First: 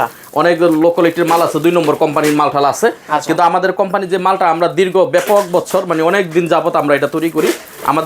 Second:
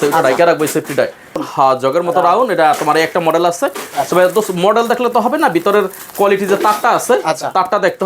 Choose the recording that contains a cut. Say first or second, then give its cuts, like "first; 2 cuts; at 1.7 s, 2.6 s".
second; 1 cut; at 1.4 s